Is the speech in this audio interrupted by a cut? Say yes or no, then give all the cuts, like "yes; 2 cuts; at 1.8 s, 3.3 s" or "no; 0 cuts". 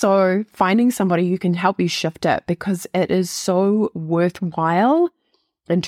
no; 0 cuts